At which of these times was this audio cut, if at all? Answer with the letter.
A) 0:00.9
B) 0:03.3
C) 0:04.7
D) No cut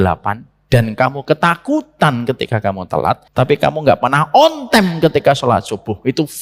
B